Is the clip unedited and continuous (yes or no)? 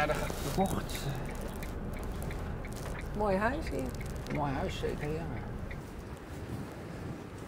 no